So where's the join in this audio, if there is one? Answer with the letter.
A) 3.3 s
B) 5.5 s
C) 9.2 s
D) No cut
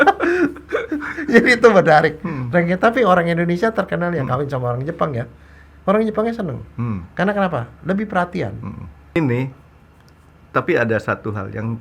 C